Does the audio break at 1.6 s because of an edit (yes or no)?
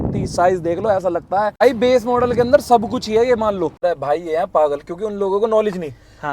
yes